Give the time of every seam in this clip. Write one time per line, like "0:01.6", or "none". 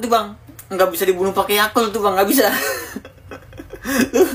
0:02.6